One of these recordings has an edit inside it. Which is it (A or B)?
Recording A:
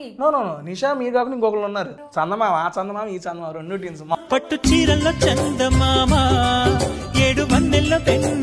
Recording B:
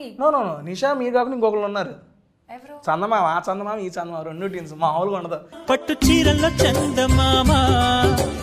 A